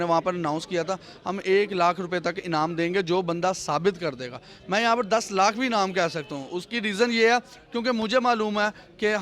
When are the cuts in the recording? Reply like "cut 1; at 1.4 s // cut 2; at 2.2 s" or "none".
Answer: none